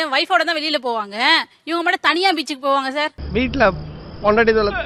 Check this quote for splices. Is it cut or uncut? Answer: uncut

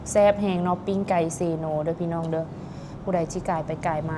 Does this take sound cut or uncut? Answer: uncut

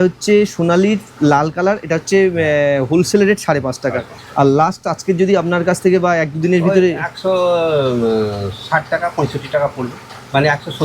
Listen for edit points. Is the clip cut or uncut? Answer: uncut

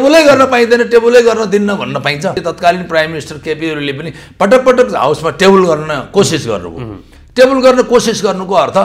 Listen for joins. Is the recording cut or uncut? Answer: cut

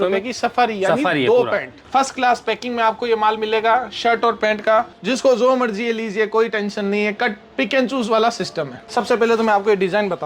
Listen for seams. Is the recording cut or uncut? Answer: cut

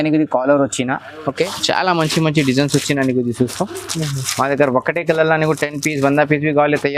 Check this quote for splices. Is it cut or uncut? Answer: cut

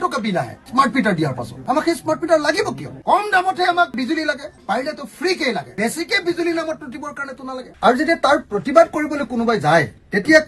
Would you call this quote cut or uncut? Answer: cut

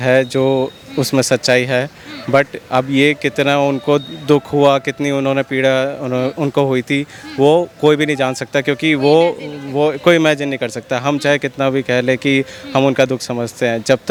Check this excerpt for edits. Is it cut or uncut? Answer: uncut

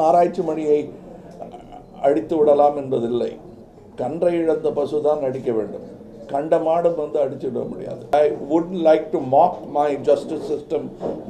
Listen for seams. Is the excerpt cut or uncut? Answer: cut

